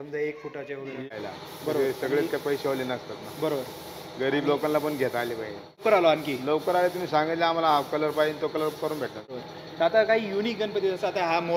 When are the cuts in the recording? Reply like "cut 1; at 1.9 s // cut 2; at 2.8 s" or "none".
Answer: cut 1; at 1.1 s // cut 2; at 5.8 s // cut 3; at 9.4 s